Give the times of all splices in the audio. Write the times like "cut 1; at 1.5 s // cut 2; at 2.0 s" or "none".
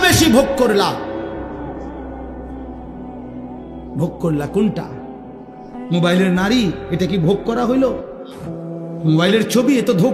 cut 1; at 1.5 s // cut 2; at 3.6 s